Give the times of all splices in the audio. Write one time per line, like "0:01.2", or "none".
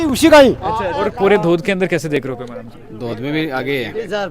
0:01.0